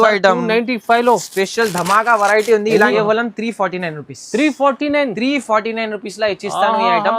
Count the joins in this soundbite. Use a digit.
1